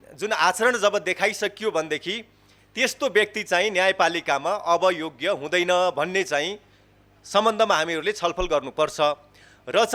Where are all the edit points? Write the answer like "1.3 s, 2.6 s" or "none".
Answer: none

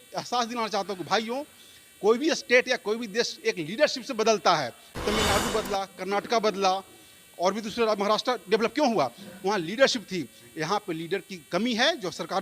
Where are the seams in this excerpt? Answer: 4.8 s

